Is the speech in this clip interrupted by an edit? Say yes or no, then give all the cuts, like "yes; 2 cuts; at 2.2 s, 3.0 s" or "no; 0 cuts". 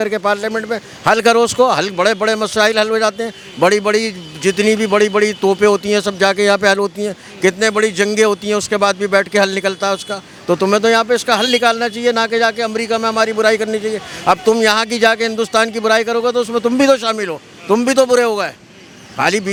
no; 0 cuts